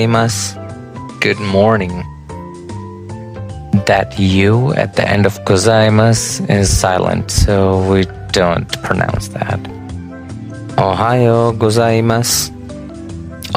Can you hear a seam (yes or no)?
no